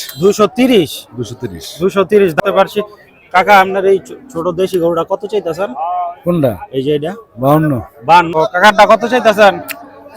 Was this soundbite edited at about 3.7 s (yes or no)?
no